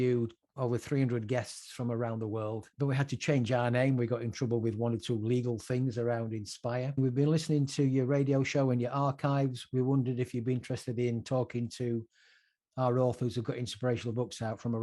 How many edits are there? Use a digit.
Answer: 2